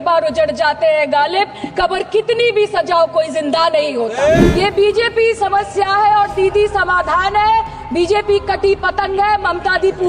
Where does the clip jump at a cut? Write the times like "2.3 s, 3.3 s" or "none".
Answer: 4.5 s